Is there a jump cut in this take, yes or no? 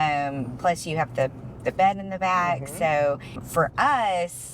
yes